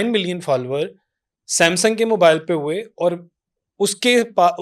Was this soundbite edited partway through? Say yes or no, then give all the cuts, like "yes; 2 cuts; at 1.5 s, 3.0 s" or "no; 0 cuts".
no; 0 cuts